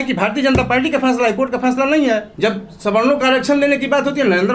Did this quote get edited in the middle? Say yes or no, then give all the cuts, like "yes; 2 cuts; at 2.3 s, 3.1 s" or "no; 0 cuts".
yes; 1 cut; at 2.3 s